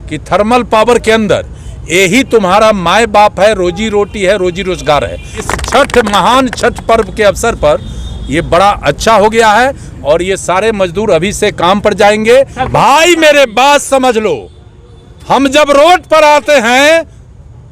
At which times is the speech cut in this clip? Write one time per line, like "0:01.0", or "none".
0:05.4
0:12.6